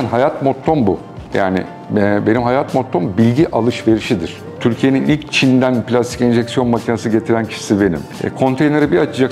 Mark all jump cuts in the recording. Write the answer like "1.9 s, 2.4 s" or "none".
4.5 s, 8.1 s